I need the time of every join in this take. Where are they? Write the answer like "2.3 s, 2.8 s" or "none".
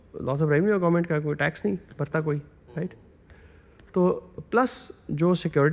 none